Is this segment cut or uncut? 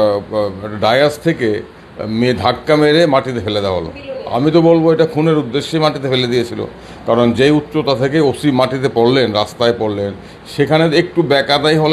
uncut